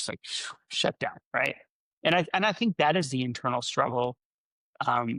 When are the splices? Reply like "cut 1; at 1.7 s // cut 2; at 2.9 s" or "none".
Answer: none